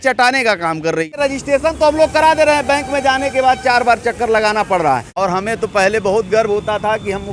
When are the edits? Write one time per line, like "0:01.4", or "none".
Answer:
0:01.1
0:05.2